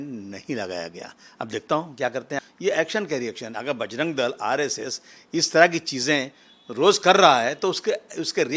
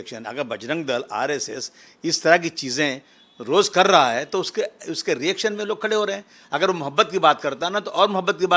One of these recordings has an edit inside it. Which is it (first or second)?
first